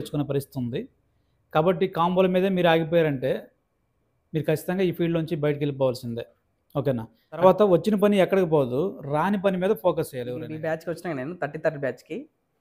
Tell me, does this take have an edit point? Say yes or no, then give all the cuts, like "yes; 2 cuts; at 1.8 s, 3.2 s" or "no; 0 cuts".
yes; 2 cuts; at 7.4 s, 10.6 s